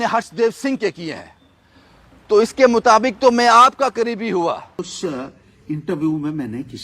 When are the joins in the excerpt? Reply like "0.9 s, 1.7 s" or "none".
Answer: 4.7 s